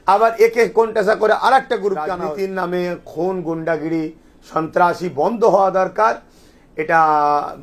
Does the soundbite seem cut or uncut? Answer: cut